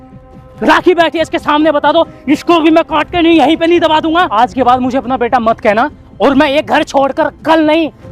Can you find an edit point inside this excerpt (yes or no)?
yes